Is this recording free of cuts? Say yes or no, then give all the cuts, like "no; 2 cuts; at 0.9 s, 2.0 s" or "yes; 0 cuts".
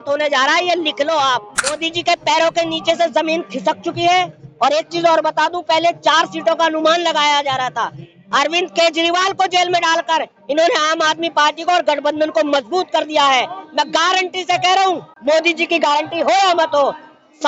no; 2 cuts; at 1.9 s, 15.1 s